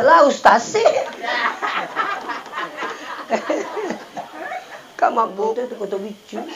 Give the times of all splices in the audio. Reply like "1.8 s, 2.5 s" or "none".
5.5 s